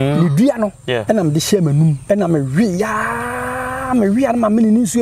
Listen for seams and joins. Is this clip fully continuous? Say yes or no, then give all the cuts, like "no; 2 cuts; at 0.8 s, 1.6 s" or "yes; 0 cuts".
no; 2 cuts; at 1.0 s, 2.0 s